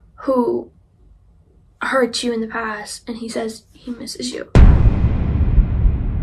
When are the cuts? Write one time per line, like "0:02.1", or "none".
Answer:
0:04.5